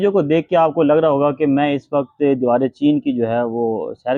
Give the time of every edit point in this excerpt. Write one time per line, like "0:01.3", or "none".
none